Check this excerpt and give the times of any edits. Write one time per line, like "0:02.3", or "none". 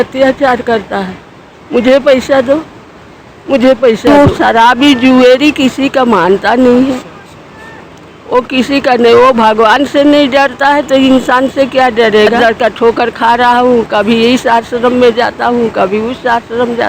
0:04.1
0:12.4